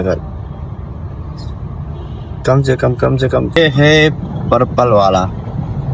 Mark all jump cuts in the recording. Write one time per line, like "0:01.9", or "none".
0:03.5